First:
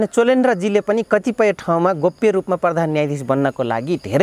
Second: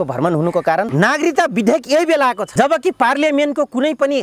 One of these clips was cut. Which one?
second; 2 cuts; at 0.9 s, 2.4 s

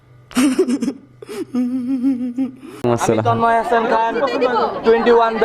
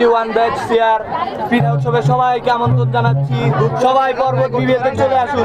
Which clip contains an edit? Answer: first; 1 cut; at 2.8 s

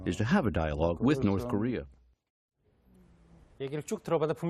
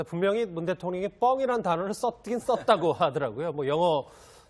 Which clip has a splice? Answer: second; 1 cut; at 2.2 s

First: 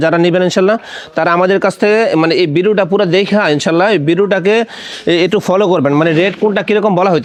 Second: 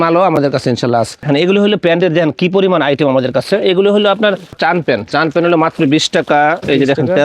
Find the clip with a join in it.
second; 2 cuts; at 1.2 s, 4.6 s

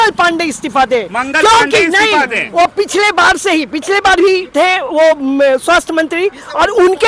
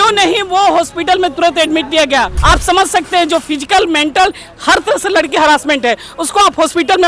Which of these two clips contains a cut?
second; 1 cut; at 2.3 s

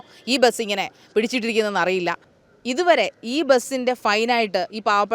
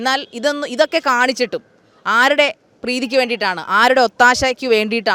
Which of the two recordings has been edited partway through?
first; 1 cut; at 2.3 s

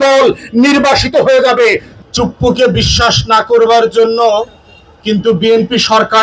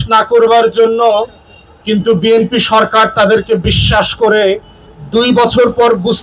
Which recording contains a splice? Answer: first; 1 cut; at 1.9 s

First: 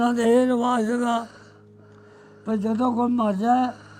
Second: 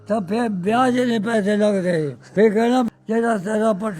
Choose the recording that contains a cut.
second; 2 cuts; at 2.3 s, 2.9 s

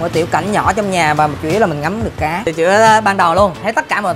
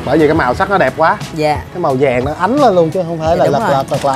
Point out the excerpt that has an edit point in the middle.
first; 1 cut; at 2.5 s

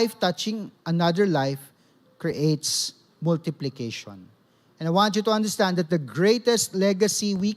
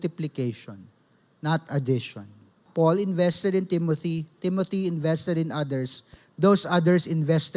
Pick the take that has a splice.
second; 1 cut; at 2.6 s

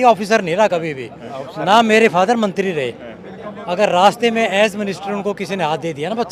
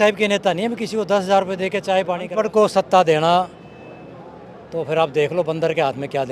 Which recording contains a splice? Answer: second; 1 cut; at 2.3 s

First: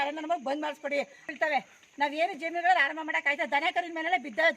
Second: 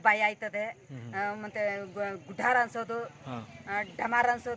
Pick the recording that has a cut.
first; 1 cut; at 1.3 s

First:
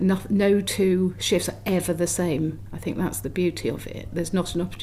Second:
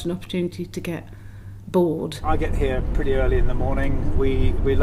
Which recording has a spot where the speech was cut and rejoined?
second; 1 cut; at 2.2 s

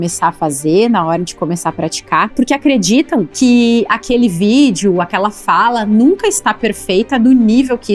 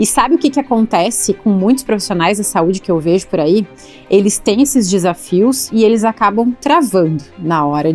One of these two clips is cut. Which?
first; 2 cuts; at 2.3 s, 3.3 s

